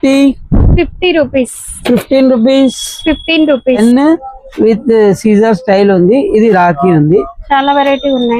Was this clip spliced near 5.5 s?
no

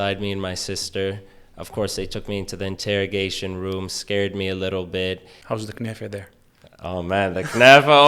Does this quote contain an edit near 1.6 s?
no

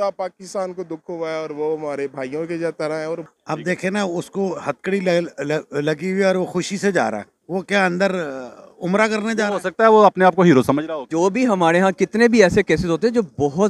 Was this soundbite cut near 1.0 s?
no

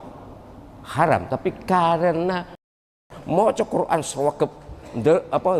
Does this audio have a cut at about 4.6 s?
no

